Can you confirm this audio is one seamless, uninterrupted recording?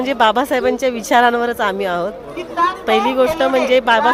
yes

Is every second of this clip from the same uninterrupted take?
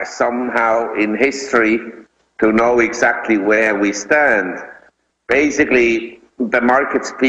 no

